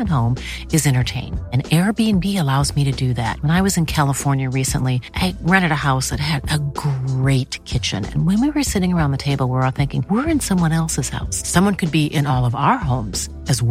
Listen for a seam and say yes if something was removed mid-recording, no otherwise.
no